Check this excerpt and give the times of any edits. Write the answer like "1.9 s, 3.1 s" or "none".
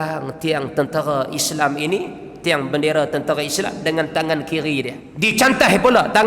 5.0 s